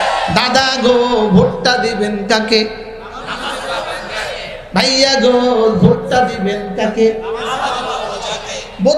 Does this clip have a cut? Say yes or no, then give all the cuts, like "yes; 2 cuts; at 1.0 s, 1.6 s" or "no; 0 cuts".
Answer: no; 0 cuts